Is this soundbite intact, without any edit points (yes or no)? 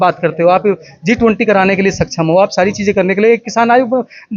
yes